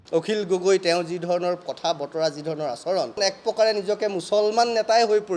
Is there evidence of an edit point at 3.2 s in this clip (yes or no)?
yes